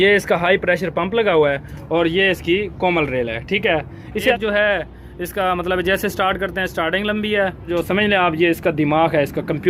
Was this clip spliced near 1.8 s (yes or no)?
no